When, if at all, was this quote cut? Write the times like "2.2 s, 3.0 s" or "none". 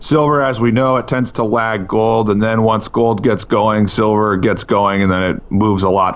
none